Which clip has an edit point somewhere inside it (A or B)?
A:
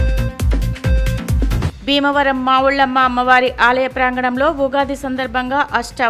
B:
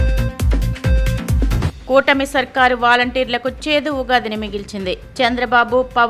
B